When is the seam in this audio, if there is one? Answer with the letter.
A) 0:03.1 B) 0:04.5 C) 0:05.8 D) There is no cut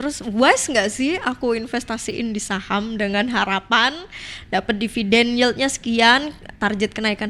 D